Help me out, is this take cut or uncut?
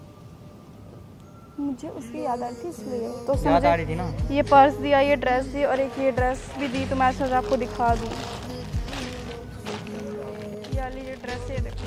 uncut